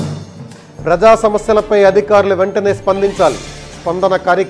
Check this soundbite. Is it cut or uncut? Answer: uncut